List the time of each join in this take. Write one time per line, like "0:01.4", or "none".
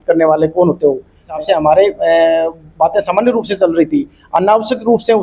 0:01.4